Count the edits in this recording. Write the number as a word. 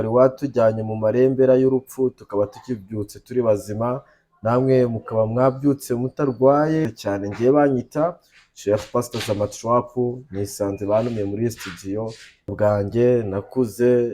two